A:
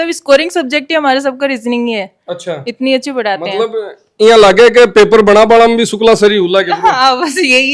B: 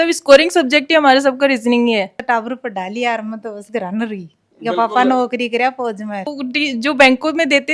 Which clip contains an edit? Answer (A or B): B